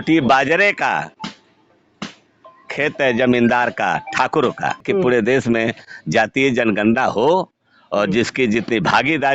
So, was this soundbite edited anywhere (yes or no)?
yes